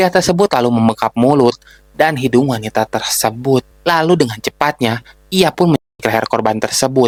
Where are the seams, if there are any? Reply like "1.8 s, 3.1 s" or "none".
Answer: none